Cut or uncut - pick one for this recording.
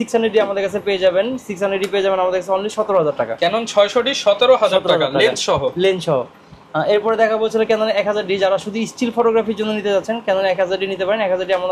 uncut